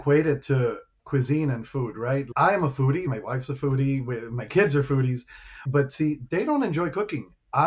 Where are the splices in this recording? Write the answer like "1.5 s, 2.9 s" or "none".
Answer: 3.1 s, 5.6 s